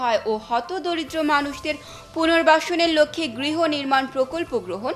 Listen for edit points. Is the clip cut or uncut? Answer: uncut